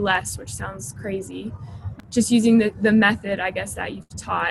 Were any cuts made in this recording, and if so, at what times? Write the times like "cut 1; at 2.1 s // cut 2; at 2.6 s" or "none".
cut 1; at 2.0 s